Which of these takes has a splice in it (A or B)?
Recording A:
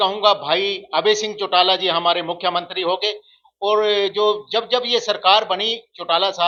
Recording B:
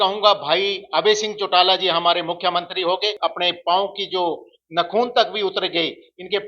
B